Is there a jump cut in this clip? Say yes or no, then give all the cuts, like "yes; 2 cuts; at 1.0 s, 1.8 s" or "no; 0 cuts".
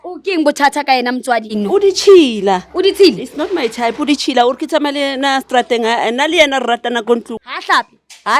yes; 2 cuts; at 1.5 s, 7.4 s